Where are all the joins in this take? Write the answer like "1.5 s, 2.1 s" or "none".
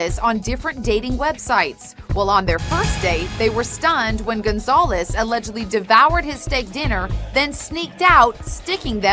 none